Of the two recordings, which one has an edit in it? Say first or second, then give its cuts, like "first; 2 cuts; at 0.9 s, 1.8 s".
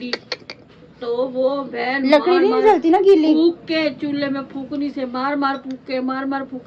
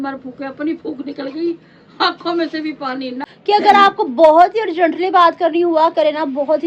second; 2 cuts; at 1.6 s, 3.3 s